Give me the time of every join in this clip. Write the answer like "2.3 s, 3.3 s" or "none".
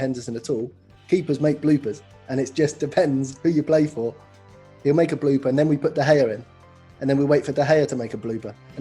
none